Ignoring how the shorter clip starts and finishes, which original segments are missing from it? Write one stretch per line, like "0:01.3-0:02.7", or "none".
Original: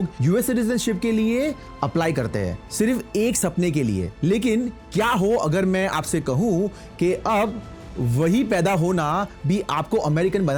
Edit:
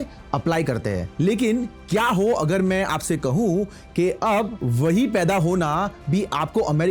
0:02.6-0:04.1
0:07.6-0:08.0